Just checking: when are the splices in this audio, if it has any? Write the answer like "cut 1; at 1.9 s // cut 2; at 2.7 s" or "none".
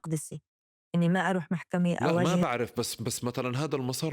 cut 1; at 2.5 s